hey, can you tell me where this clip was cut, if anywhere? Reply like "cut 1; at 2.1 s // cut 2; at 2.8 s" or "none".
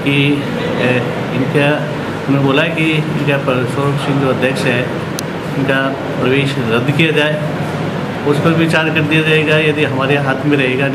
none